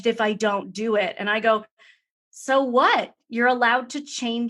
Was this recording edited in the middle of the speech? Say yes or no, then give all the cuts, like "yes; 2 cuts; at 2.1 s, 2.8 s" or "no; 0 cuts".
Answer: no; 0 cuts